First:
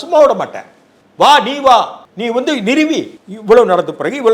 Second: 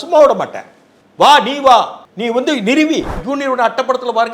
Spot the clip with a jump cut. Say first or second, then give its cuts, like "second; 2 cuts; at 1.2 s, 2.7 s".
second; 1 cut; at 3.2 s